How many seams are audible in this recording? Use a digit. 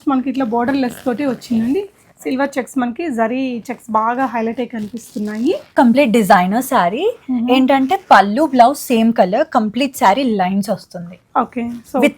1